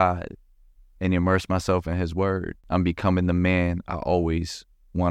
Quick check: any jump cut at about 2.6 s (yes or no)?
yes